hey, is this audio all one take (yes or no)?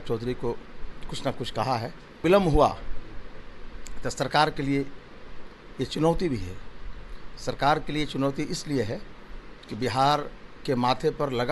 no